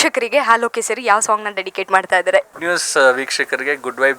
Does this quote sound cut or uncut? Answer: cut